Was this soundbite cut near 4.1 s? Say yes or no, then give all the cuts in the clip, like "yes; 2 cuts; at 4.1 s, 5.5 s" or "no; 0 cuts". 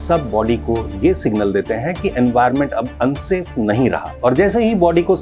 yes; 1 cut; at 4.1 s